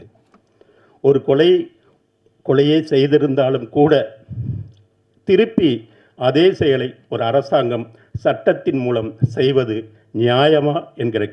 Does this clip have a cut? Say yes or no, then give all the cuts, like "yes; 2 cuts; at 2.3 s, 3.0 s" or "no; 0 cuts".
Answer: no; 0 cuts